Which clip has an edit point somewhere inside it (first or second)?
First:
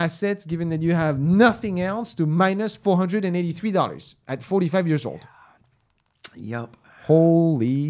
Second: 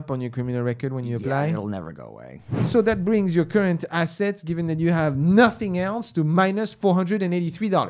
second